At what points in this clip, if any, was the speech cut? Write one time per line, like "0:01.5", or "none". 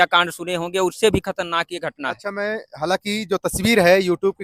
none